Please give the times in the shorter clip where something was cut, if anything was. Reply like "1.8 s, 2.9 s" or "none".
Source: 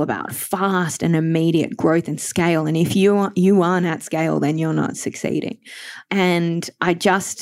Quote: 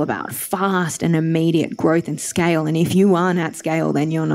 2.9 s